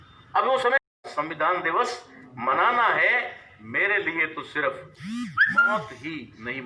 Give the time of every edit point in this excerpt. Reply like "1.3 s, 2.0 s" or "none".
0.9 s